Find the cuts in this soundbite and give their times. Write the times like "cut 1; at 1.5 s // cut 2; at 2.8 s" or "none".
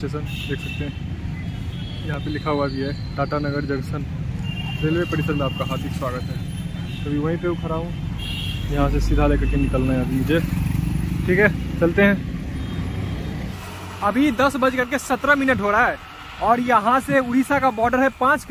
none

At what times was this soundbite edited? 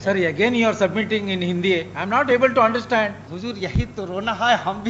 cut 1; at 3.3 s

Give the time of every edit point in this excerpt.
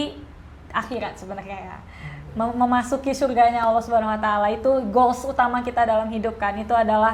none

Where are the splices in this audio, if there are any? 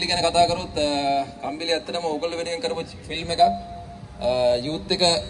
none

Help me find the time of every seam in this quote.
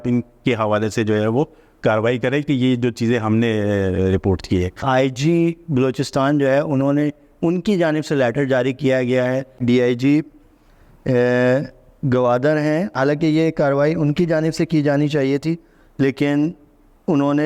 cut 1; at 4.8 s // cut 2; at 9.6 s // cut 3; at 12.9 s

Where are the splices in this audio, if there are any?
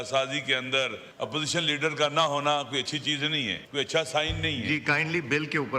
cut 1; at 1.0 s // cut 2; at 3.6 s

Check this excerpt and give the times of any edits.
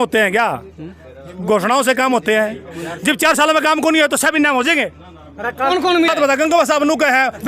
cut 1; at 5.7 s

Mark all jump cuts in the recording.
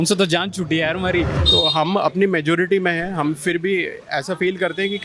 cut 1; at 1.4 s

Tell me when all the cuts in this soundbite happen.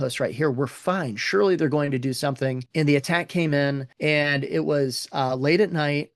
cut 1; at 2.6 s // cut 2; at 3.9 s

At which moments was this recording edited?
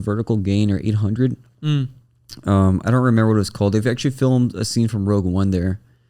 none

